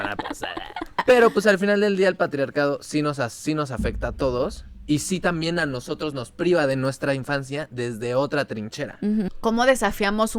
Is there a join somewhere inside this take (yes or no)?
yes